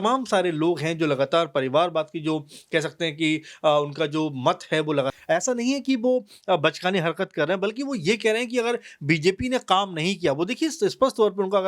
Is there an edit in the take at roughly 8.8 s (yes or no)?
no